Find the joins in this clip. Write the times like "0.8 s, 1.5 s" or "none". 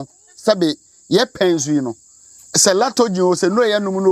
none